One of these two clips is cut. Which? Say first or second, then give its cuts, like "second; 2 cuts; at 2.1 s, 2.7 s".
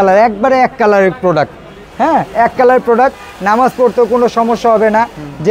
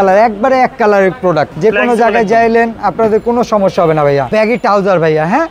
second; 2 cuts; at 1.5 s, 4.3 s